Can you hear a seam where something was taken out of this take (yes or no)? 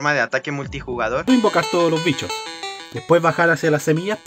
yes